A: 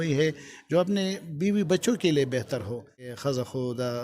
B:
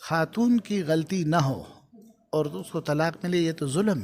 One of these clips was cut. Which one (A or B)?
A